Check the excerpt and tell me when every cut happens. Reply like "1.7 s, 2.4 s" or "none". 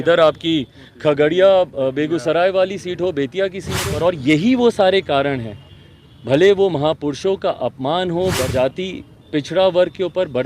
3.9 s, 8.5 s